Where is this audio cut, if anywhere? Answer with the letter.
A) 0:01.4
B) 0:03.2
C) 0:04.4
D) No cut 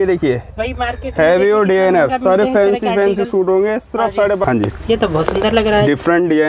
C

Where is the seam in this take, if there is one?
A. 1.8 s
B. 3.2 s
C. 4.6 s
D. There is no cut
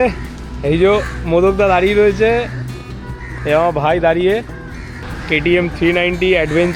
C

